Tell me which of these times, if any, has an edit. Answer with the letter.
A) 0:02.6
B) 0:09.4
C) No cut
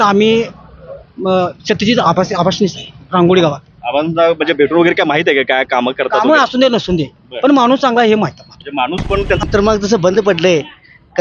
B